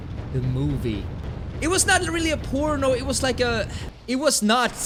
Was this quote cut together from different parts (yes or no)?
no